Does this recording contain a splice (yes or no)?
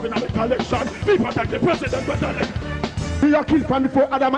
yes